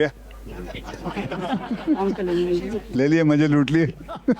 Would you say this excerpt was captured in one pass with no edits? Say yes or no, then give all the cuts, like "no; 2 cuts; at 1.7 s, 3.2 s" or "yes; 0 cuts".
yes; 0 cuts